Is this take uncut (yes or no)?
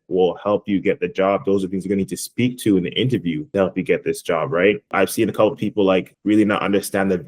no